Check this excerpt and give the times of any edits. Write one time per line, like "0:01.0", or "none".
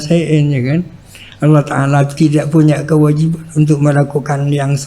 0:02.1